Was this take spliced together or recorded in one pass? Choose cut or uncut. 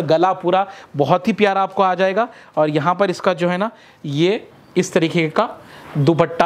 uncut